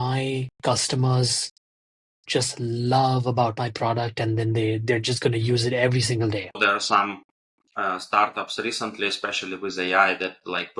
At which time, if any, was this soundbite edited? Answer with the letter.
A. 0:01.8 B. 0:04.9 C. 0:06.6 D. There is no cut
C